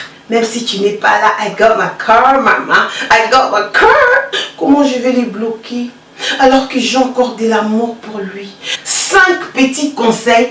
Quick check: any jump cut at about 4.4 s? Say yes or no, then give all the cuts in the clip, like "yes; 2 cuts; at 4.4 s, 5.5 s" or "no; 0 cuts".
yes; 2 cuts; at 4.4 s, 8.7 s